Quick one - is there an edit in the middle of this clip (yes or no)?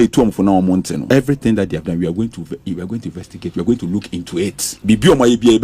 yes